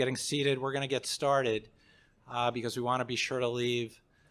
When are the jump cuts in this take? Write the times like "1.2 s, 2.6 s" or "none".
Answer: none